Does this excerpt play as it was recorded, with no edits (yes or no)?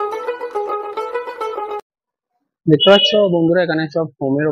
yes